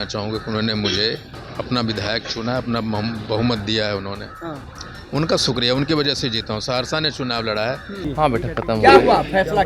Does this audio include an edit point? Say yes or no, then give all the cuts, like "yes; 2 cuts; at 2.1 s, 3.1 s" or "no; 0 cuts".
yes; 2 cuts; at 1.4 s, 8.0 s